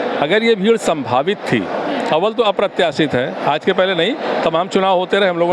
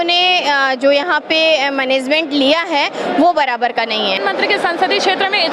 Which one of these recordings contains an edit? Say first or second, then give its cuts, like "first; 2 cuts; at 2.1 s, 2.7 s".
second; 1 cut; at 4.2 s